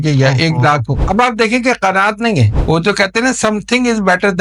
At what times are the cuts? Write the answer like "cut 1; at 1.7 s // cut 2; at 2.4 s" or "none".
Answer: cut 1; at 1.0 s // cut 2; at 2.5 s